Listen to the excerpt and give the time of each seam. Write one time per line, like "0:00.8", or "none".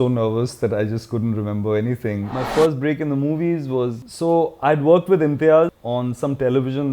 0:02.3
0:05.8